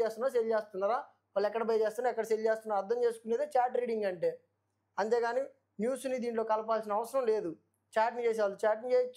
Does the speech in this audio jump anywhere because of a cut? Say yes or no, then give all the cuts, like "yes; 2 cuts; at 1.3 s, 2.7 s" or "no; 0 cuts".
no; 0 cuts